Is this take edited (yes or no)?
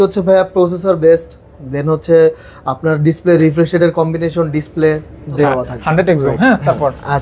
yes